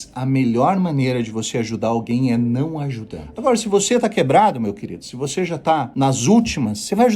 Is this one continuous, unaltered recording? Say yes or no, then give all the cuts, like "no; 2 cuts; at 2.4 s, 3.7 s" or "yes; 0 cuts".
no; 2 cuts; at 3.2 s, 5.9 s